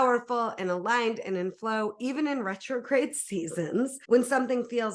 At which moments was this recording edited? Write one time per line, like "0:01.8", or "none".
0:04.0